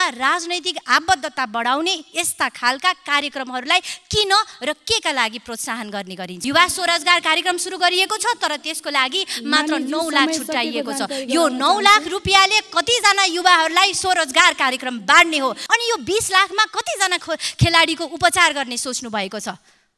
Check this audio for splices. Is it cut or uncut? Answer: cut